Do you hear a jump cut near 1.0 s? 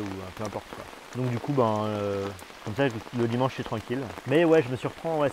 yes; 1 cut; at 1.0 s

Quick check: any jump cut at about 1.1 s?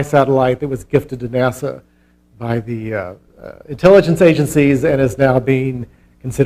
yes; 1 cut; at 1.1 s

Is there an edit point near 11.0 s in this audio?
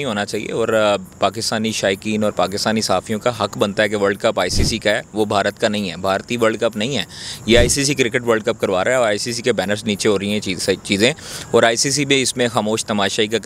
no; 0 cuts

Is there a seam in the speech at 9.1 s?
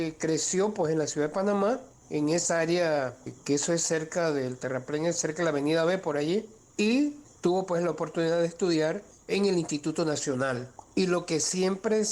yes; 6 cuts; at 2.0 s, 3.3 s, 6.6 s, 7.3 s, 9.1 s, 10.7 s

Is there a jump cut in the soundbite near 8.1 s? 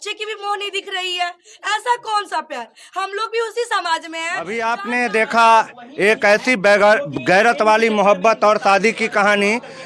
no; 1 cut; at 4.6 s

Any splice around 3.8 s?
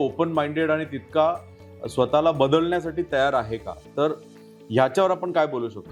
no; 0 cuts

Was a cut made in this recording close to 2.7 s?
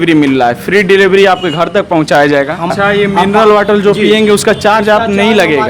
yes; 1 cut; at 2.7 s

